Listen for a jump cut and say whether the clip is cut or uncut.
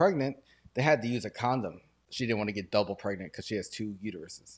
cut